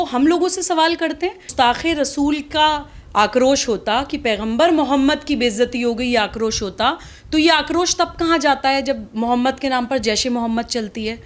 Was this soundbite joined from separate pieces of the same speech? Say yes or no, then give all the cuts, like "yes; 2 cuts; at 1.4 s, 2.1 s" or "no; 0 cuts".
yes; 1 cut; at 1.5 s